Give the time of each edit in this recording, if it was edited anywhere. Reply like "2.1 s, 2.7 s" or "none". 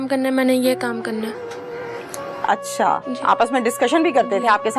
none